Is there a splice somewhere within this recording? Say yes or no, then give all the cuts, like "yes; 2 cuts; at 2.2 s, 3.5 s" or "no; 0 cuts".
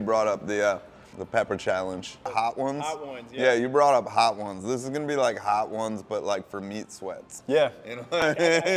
yes; 2 cuts; at 1.2 s, 2.2 s